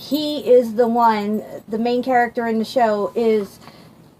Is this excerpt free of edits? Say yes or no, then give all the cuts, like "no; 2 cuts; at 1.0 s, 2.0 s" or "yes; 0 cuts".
no; 1 cut; at 1.4 s